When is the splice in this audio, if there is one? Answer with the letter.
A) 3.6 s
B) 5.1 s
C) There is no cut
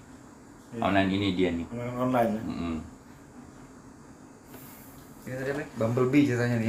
C